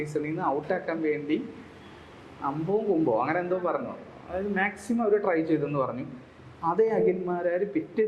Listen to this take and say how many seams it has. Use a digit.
0